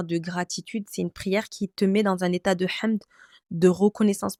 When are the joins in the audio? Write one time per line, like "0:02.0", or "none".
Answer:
none